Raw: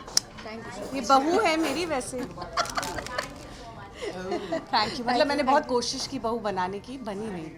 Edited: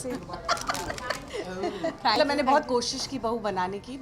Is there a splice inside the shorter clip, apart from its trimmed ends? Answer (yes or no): yes